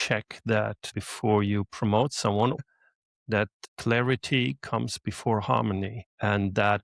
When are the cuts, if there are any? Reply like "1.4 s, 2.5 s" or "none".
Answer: 0.9 s, 2.6 s